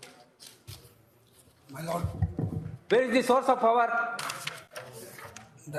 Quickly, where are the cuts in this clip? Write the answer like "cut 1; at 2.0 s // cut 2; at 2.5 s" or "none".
none